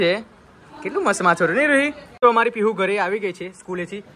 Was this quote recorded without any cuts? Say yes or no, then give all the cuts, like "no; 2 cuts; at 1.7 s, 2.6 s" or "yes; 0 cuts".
no; 1 cut; at 2.1 s